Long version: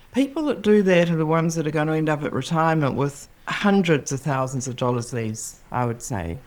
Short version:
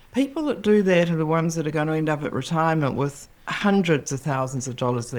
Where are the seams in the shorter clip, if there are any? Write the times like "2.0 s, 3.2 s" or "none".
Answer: none